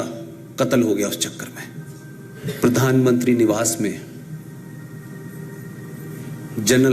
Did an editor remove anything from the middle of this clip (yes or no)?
yes